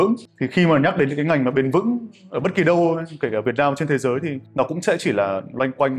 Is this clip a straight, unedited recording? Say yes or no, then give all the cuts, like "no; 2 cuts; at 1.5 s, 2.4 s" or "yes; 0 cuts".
yes; 0 cuts